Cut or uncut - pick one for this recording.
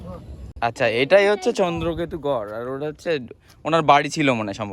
uncut